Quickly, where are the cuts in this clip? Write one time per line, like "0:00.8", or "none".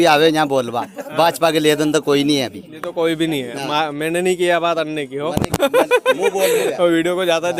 none

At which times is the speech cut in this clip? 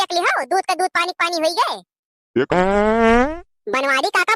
0:02.5

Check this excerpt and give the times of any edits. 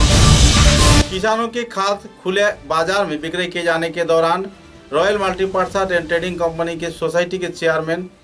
0:01.0

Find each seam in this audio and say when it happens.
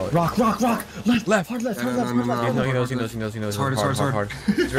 none

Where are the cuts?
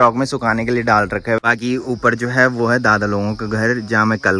0:01.4

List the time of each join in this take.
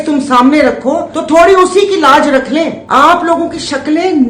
0:01.1
0:02.8

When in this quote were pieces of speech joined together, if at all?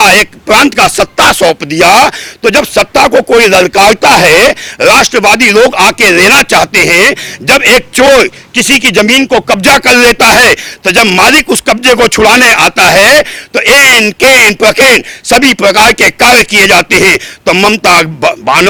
none

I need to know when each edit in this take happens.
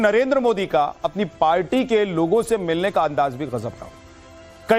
0:01.1

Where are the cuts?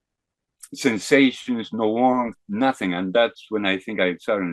none

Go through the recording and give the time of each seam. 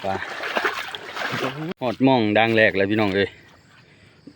0:01.7

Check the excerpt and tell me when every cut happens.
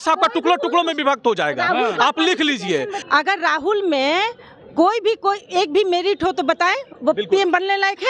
0:02.9

